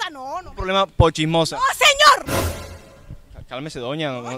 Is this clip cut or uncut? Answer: uncut